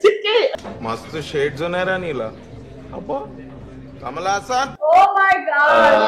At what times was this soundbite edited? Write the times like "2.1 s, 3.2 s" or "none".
4.7 s